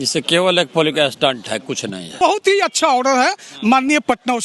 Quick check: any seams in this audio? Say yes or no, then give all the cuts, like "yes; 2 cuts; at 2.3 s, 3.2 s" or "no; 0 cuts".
yes; 1 cut; at 2.2 s